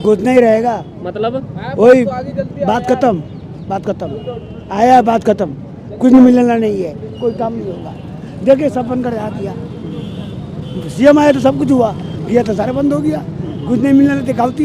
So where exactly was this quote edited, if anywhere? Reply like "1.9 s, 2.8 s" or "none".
none